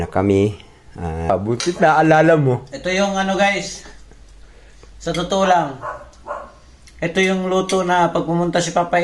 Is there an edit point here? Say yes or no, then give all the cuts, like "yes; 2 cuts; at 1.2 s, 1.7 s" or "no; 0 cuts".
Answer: yes; 1 cut; at 1.3 s